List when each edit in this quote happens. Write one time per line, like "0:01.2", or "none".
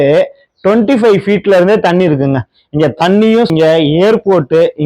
0:03.5